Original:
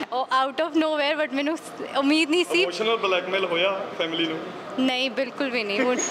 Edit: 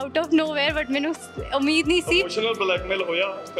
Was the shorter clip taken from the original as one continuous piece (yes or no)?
yes